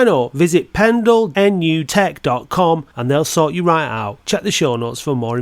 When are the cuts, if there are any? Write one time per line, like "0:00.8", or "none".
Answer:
0:01.6